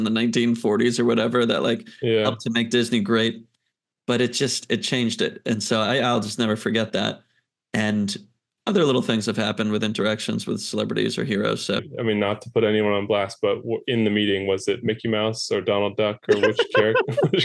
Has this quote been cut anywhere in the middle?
yes; 1 cut; at 11.9 s

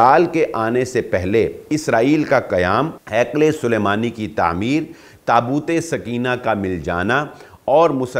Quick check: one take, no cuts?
no; 1 cut; at 3.0 s

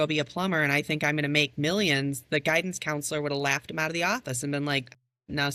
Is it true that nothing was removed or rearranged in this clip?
yes; 0 cuts

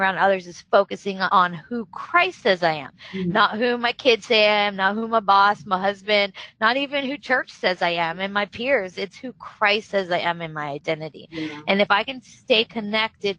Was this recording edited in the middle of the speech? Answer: no; 0 cuts

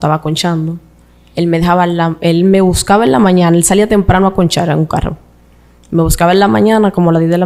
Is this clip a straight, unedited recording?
yes; 0 cuts

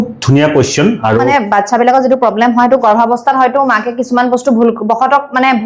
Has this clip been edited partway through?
yes; 1 cut; at 1.3 s

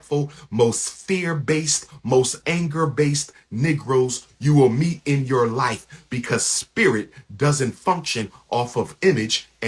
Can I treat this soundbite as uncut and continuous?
yes; 0 cuts

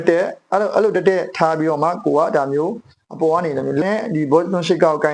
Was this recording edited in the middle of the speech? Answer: yes; 1 cut; at 3.8 s

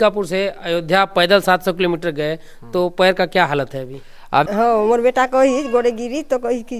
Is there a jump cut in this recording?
yes; 1 cut; at 4.5 s

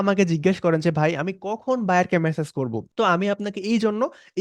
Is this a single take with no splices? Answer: yes; 0 cuts

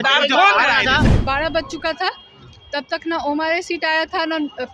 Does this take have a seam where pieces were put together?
yes; 1 cut; at 1.1 s

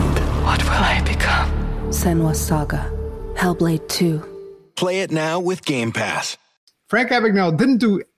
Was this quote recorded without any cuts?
no; 1 cut; at 6.5 s

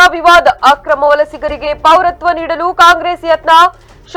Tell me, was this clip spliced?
no; 0 cuts

